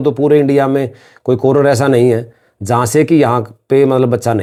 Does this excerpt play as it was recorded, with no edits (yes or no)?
yes